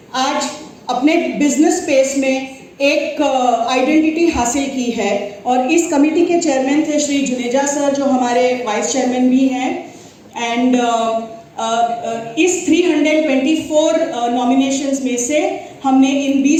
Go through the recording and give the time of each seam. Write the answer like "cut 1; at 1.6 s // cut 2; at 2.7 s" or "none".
none